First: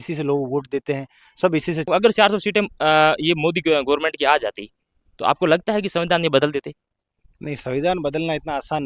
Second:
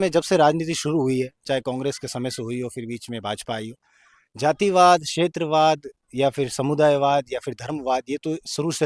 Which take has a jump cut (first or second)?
first